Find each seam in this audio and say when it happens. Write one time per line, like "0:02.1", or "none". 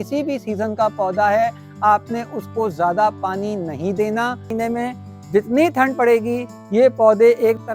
0:04.5